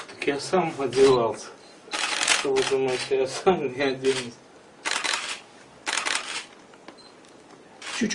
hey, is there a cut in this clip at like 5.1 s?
no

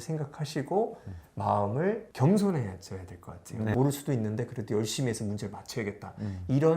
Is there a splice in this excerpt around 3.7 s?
yes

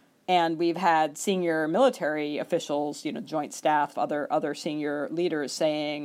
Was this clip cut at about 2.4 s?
no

